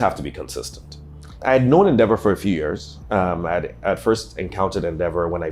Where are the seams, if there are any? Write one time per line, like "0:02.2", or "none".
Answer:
0:01.4